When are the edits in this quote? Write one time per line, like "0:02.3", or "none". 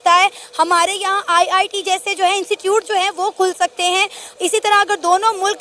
0:04.2